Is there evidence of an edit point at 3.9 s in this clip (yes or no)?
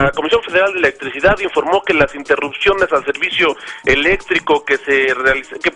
yes